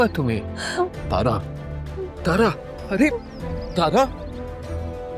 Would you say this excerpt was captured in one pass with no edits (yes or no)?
yes